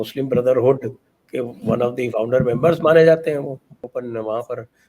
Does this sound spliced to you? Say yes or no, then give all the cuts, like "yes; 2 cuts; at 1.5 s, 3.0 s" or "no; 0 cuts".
yes; 1 cut; at 3.9 s